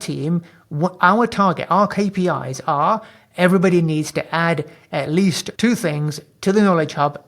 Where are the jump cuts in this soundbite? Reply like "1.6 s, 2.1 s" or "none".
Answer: 5.5 s